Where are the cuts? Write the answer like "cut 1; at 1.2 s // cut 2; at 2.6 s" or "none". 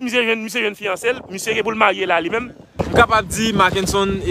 cut 1; at 2.8 s